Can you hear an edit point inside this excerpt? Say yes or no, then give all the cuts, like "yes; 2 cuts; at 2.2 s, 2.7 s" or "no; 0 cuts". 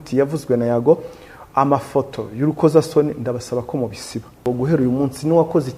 yes; 1 cut; at 4.4 s